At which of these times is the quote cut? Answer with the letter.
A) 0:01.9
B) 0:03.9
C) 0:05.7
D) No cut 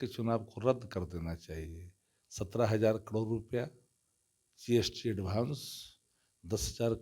D